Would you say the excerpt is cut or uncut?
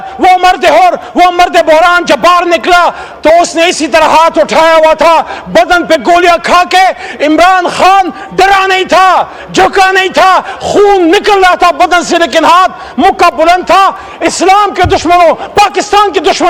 uncut